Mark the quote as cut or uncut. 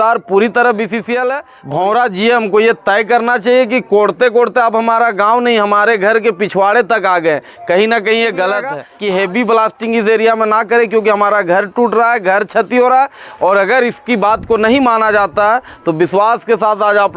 cut